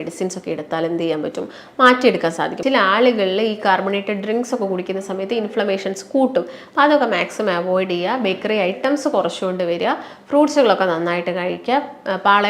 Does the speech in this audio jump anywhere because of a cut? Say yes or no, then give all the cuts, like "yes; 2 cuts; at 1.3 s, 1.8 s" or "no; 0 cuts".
yes; 1 cut; at 2.6 s